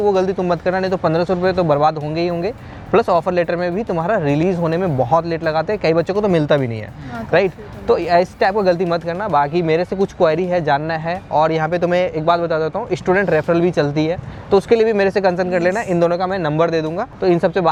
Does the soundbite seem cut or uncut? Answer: uncut